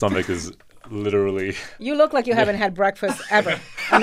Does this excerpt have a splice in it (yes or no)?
no